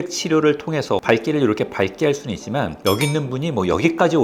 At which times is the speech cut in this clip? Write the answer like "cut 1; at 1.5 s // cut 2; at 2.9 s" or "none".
cut 1; at 1.0 s